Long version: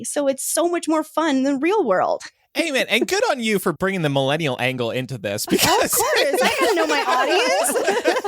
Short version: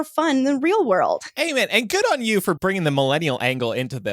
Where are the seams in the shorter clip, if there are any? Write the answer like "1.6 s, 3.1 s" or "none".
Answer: 1.3 s